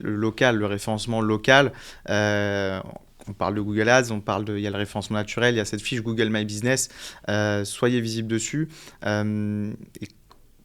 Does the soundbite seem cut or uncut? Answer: uncut